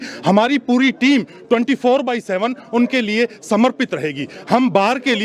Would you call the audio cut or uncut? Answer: uncut